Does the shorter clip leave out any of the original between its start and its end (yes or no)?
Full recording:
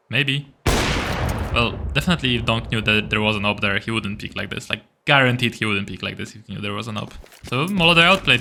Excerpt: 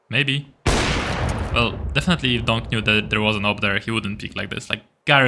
no